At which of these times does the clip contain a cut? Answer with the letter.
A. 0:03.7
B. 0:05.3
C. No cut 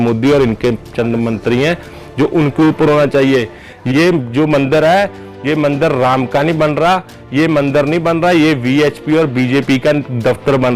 A